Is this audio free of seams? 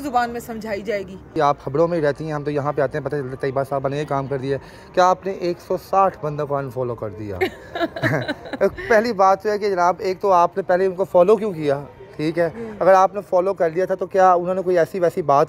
no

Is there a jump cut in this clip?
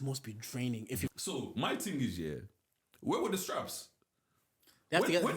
yes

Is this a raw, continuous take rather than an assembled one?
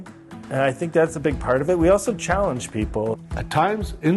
no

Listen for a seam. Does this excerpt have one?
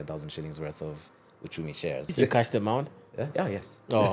yes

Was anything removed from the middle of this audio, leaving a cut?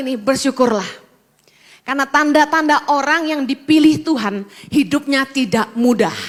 no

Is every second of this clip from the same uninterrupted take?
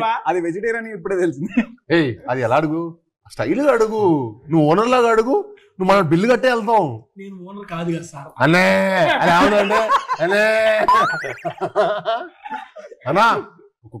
yes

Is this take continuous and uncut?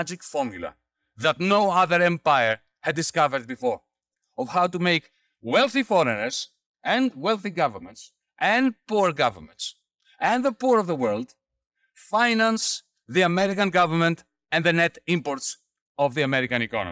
yes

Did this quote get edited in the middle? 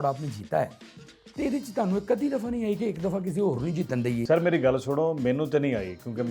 no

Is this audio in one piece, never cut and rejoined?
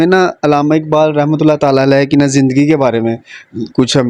yes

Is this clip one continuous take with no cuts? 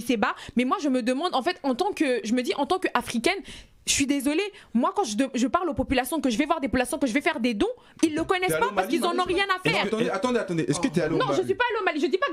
yes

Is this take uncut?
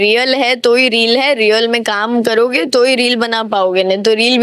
yes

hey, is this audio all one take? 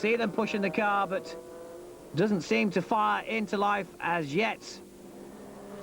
yes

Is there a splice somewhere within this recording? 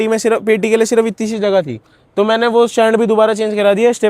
no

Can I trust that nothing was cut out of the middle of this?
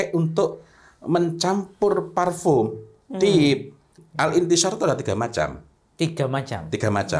no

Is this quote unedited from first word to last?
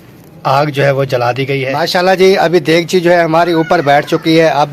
no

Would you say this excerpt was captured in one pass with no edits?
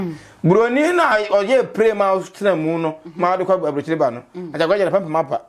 yes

